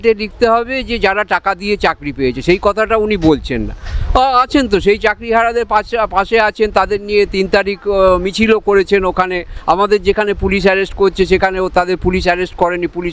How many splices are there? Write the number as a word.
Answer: zero